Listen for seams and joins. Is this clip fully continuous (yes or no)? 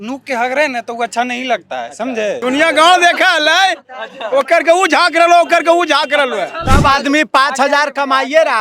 no